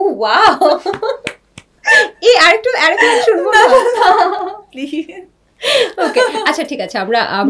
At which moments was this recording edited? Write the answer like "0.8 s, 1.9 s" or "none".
none